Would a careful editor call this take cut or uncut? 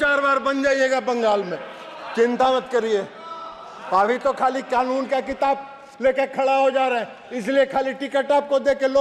uncut